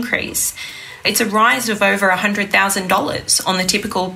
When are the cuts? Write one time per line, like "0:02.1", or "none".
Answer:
0:01.0